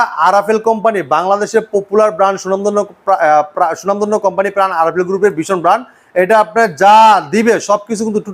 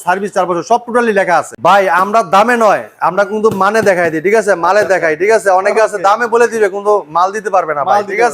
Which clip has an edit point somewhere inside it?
second; 1 cut; at 1.5 s

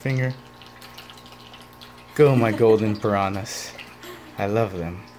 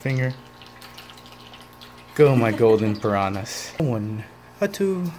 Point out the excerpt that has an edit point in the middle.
second; 1 cut; at 3.8 s

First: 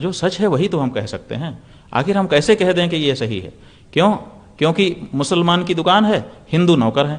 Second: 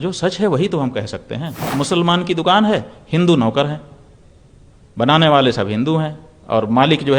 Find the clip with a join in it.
second; 1 cut; at 1.6 s

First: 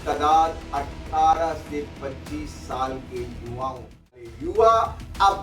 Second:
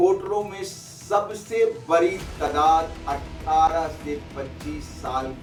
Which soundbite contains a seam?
first; 1 cut; at 4.3 s

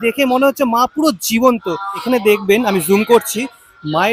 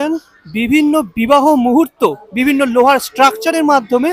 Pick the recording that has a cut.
first; 1 cut; at 1.9 s

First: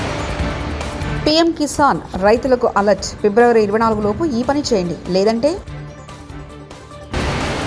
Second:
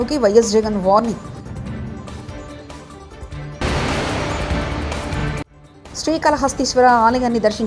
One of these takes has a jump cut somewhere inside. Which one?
first; 1 cut; at 1.0 s

